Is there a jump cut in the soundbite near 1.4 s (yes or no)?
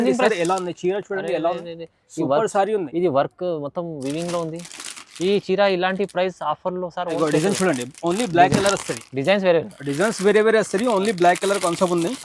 no